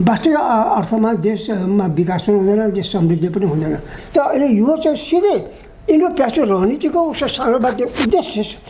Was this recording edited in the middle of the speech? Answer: yes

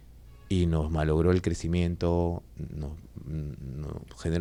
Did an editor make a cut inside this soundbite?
no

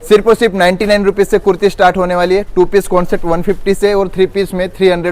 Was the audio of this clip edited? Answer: no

